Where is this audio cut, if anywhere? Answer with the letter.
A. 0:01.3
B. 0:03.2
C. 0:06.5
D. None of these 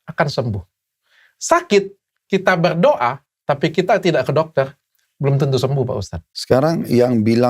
C